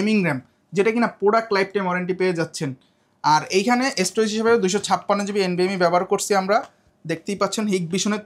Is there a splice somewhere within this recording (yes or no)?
no